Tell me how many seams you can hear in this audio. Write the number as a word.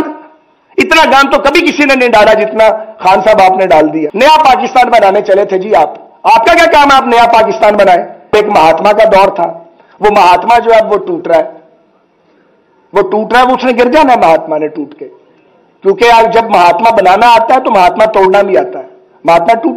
two